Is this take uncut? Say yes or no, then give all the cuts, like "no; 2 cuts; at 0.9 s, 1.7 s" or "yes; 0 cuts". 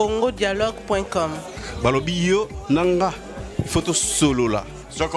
yes; 0 cuts